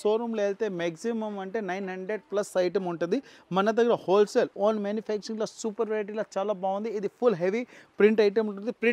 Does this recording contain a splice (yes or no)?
no